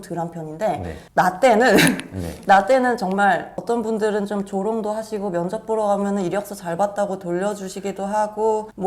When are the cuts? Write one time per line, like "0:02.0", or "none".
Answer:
0:03.5